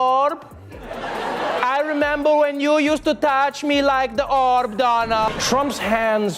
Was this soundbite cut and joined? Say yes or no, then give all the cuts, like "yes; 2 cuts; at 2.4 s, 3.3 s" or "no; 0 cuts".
yes; 1 cut; at 5.4 s